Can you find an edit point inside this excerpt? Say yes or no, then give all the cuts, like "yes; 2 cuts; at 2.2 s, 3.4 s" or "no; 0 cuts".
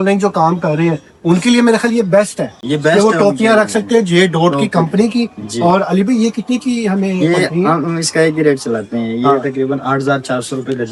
no; 0 cuts